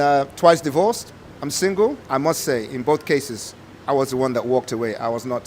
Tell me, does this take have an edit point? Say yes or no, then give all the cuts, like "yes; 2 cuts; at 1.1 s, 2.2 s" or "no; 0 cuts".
yes; 1 cut; at 2.0 s